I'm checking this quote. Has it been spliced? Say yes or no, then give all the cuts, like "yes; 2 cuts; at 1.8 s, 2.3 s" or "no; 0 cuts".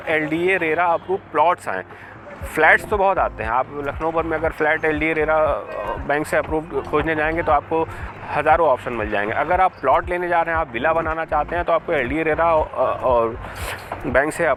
no; 0 cuts